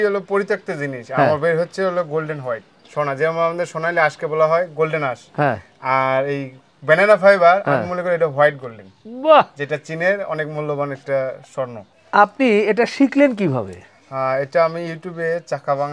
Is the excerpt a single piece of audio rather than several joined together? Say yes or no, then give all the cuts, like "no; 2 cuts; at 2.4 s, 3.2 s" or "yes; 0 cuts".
yes; 0 cuts